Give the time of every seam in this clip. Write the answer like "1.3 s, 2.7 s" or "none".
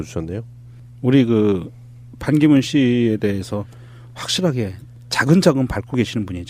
1.0 s

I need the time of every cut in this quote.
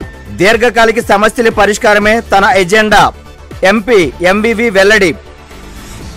none

